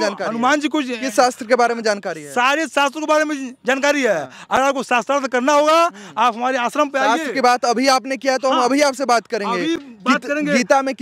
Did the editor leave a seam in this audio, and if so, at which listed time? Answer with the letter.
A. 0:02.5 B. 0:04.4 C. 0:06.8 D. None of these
D